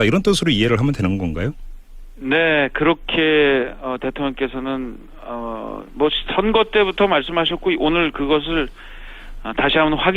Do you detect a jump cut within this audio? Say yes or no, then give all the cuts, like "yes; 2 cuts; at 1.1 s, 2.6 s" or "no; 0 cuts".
yes; 1 cut; at 2.1 s